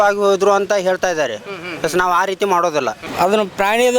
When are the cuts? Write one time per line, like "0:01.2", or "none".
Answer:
0:03.0